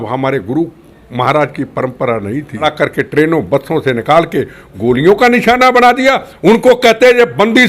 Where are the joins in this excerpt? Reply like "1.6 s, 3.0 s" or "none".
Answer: 2.6 s

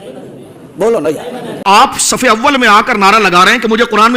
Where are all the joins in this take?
1.6 s

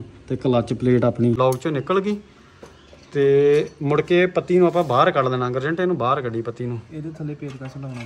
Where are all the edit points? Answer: 1.3 s

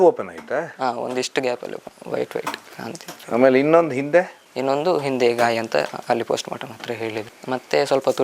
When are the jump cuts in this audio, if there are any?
none

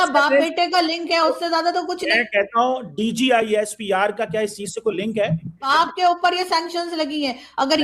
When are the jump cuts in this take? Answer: 5.7 s

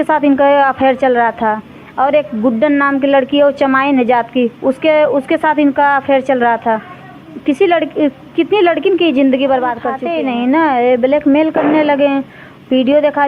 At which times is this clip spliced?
9.9 s

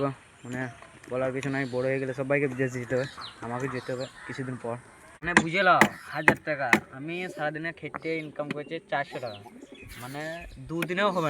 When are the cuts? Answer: 5.2 s

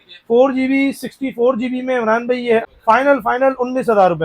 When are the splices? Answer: 2.7 s

